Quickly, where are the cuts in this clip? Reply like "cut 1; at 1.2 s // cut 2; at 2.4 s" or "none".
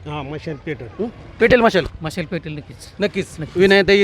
none